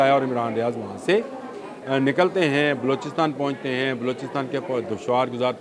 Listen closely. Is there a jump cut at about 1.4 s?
no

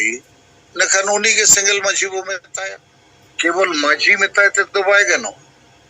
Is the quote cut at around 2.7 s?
yes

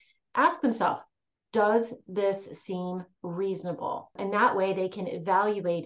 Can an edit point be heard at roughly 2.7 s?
no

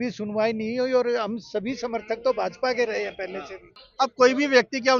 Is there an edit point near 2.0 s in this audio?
no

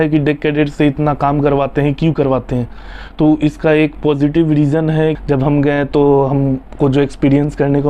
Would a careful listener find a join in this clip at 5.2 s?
yes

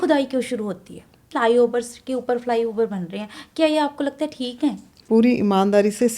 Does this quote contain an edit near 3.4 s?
no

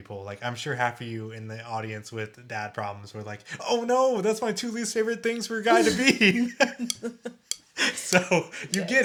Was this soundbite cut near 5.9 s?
no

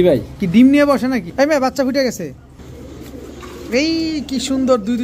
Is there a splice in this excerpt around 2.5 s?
yes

